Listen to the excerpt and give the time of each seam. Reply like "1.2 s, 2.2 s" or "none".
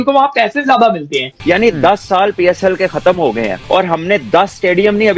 1.3 s, 3.6 s